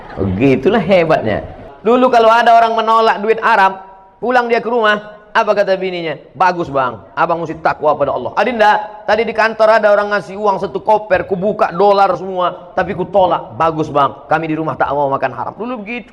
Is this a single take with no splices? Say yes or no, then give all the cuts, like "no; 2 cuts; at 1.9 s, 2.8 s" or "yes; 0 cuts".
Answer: no; 1 cut; at 1.6 s